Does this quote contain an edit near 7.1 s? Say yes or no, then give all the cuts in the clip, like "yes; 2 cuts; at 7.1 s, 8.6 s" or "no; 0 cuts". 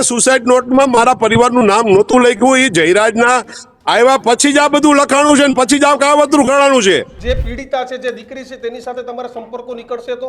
yes; 1 cut; at 7.1 s